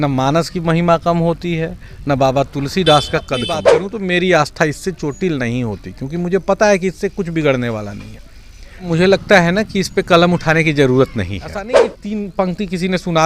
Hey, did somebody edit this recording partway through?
yes; 3 cuts; at 3.7 s, 8.9 s, 11.9 s

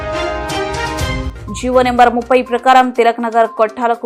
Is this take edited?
yes; 1 cut; at 1.3 s

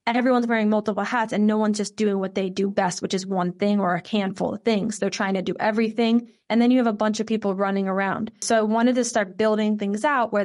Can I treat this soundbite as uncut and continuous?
no; 1 cut; at 8.4 s

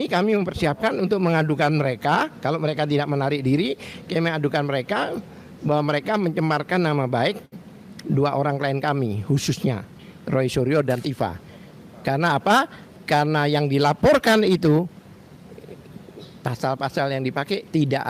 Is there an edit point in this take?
no; 0 cuts

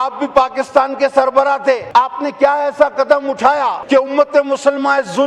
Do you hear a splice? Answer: yes; 2 cuts; at 1.8 s, 3.8 s

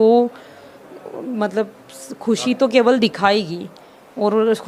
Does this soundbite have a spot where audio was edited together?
no; 0 cuts

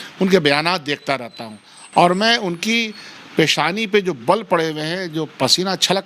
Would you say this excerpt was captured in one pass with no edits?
yes; 0 cuts

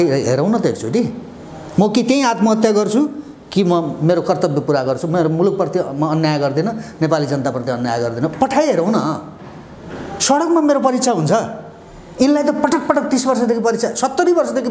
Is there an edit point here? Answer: no; 0 cuts

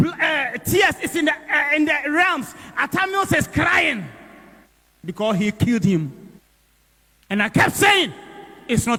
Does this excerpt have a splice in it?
no; 0 cuts

